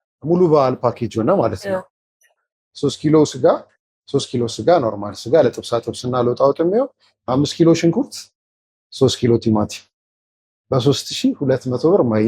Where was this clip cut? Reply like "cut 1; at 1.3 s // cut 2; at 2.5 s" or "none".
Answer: cut 1; at 2.3 s